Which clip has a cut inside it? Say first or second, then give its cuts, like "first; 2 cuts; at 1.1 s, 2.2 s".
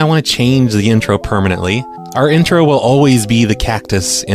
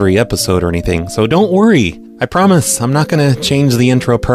second; 1 cut; at 0.9 s